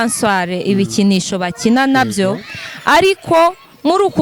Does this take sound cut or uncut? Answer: uncut